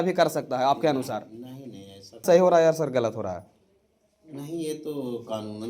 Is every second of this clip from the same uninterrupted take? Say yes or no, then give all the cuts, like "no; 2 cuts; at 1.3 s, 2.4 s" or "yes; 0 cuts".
no; 1 cut; at 2.2 s